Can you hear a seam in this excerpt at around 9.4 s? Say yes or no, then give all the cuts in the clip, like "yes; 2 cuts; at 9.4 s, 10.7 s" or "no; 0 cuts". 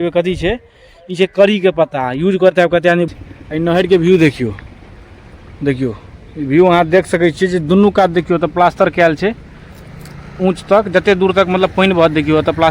no; 1 cut; at 3.1 s